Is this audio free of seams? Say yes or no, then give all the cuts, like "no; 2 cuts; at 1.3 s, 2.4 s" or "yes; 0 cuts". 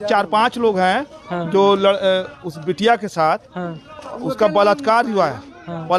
yes; 0 cuts